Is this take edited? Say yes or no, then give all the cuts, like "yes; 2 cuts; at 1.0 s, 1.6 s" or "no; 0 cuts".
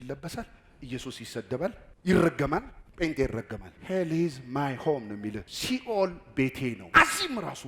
yes; 3 cuts; at 3.7 s, 5.5 s, 6.8 s